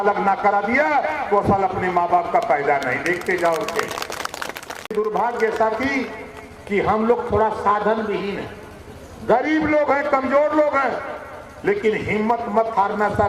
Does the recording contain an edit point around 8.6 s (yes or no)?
no